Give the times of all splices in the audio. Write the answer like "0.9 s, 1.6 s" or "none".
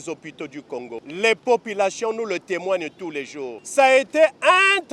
1.0 s, 3.6 s